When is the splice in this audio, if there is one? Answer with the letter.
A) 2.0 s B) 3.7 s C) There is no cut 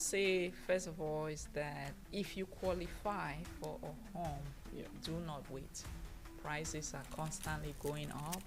A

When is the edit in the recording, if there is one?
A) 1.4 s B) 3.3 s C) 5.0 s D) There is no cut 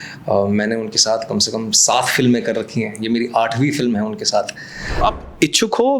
C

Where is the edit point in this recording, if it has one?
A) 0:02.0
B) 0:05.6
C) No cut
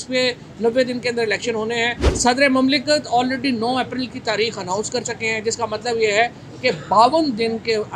A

